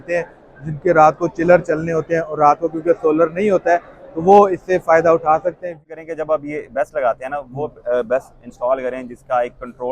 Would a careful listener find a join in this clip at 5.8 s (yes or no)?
yes